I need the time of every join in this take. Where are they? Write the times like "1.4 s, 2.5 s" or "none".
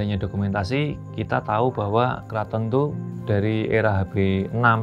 2.2 s, 3.1 s